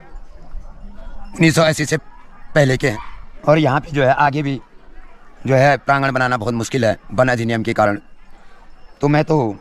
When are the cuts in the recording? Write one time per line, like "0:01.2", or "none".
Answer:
none